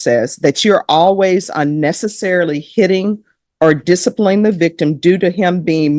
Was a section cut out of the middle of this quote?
no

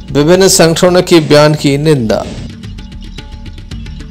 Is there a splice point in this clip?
no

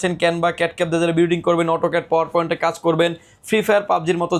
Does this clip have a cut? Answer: no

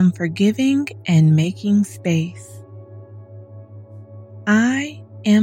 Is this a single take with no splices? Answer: no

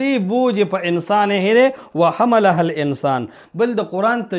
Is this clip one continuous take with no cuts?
yes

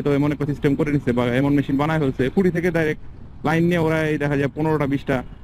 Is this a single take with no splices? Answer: yes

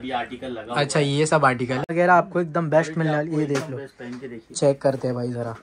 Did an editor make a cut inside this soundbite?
yes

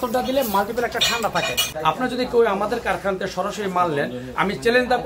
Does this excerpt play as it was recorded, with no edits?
no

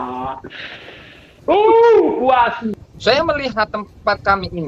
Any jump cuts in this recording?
yes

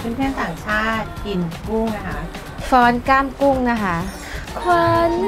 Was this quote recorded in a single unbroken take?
yes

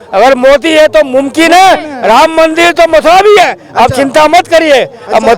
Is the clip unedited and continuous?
yes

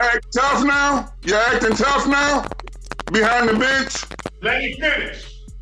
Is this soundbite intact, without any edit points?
no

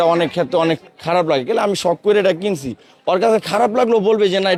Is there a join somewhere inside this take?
no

